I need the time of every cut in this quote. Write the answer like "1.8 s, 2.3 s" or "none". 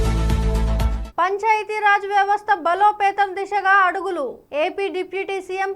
0.9 s